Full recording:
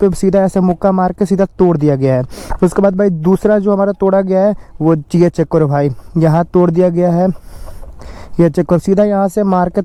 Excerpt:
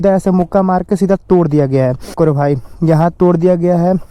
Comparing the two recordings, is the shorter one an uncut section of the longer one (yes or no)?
no